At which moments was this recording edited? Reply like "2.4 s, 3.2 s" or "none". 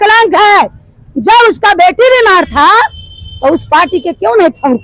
none